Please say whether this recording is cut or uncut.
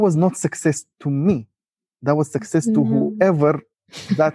uncut